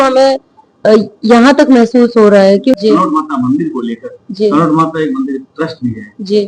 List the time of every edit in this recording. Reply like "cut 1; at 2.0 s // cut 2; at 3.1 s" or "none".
cut 1; at 2.8 s